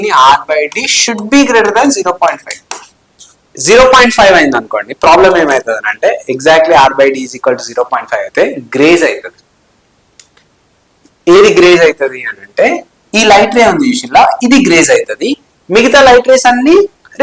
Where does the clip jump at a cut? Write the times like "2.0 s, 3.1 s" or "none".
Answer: none